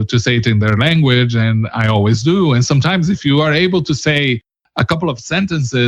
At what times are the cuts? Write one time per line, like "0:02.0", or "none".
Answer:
0:04.6